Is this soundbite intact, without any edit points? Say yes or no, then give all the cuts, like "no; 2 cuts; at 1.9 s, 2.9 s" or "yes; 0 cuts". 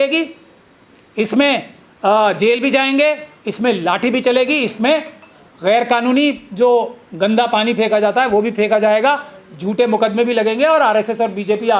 yes; 0 cuts